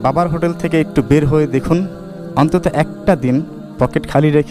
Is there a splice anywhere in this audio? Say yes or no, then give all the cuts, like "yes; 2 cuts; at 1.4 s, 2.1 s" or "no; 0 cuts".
no; 0 cuts